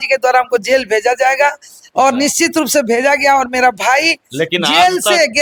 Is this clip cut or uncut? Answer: uncut